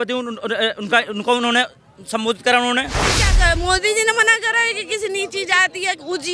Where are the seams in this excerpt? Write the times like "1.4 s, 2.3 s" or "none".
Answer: 3.3 s